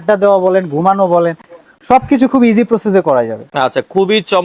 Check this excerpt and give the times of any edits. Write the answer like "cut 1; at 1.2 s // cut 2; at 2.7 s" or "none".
none